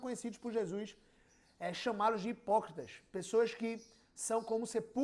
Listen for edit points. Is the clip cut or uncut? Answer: uncut